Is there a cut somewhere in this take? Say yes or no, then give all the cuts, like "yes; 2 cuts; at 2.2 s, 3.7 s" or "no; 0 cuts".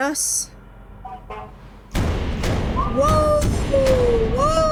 no; 0 cuts